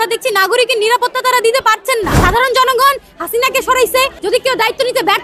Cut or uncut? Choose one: cut